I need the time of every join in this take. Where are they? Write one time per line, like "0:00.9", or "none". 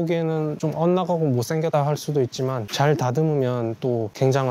none